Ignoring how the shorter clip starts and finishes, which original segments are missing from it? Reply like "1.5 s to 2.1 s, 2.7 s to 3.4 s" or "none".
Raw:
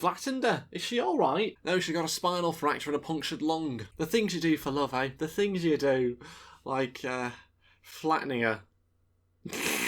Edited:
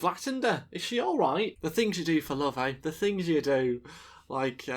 1.5 s to 3.9 s